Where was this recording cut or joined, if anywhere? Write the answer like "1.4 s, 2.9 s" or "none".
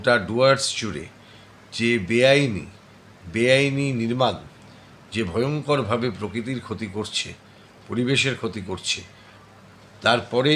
none